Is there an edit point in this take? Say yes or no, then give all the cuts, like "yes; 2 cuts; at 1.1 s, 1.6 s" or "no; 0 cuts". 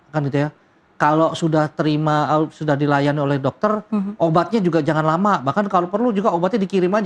no; 0 cuts